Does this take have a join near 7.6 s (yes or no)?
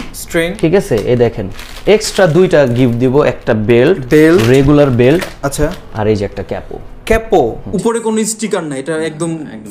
yes